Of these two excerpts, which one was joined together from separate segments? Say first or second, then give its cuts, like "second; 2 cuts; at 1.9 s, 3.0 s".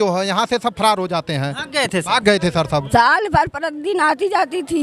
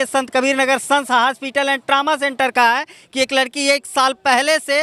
first; 1 cut; at 2.8 s